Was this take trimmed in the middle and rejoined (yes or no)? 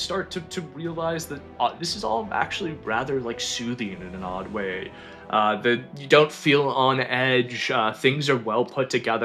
no